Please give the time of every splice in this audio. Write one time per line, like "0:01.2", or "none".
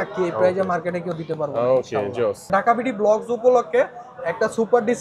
0:02.5